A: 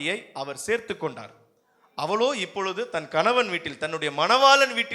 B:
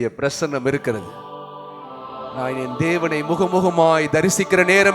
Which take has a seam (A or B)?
B